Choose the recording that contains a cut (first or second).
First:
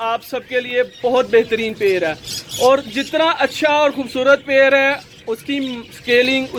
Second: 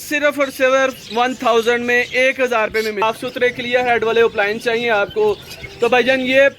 second